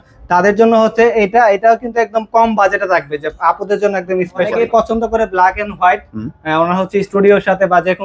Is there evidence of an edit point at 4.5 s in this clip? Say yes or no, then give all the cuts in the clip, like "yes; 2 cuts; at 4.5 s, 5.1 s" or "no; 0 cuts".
yes; 1 cut; at 4.5 s